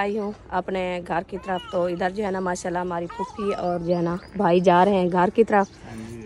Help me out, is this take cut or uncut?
uncut